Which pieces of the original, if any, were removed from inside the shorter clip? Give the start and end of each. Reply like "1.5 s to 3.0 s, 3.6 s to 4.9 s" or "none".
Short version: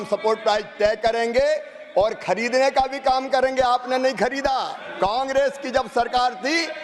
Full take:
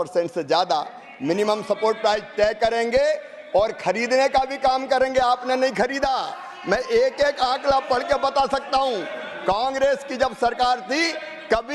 6.4 s to 9.3 s